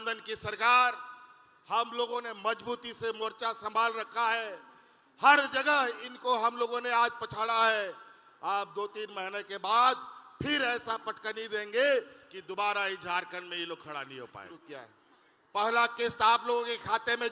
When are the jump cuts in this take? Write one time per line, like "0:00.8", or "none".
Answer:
0:14.5